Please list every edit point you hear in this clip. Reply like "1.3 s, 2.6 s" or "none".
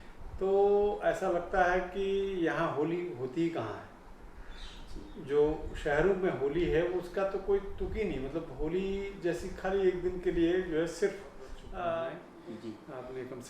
12.3 s